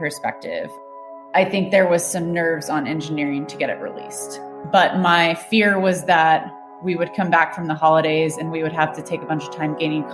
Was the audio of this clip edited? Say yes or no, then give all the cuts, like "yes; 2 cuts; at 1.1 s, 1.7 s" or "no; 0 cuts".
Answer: no; 0 cuts